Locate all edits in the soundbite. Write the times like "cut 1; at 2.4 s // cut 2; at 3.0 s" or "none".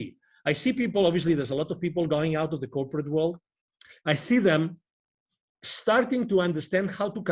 none